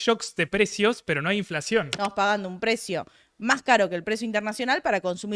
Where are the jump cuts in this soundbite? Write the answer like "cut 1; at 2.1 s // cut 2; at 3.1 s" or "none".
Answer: cut 1; at 1.9 s